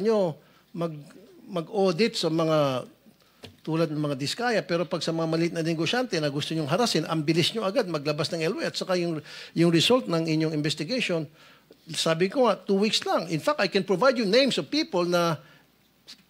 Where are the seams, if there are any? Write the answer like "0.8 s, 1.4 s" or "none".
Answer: none